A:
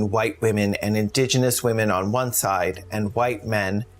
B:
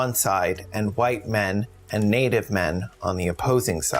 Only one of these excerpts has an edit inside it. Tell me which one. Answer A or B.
B